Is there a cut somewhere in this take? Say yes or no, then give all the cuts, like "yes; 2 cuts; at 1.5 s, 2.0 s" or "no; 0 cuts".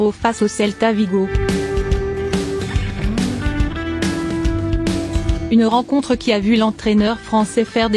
yes; 2 cuts; at 1.3 s, 5.5 s